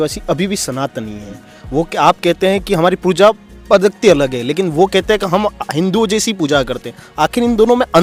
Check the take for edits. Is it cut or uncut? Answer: uncut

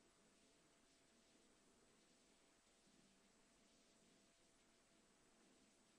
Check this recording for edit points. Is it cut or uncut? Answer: cut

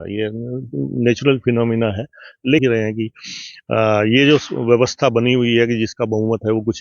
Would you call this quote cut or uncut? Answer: cut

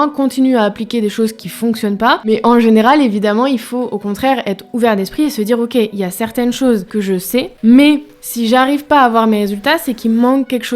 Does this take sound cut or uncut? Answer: cut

